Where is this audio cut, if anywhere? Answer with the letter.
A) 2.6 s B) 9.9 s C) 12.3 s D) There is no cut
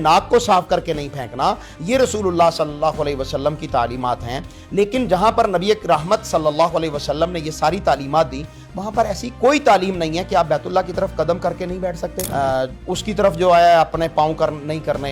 C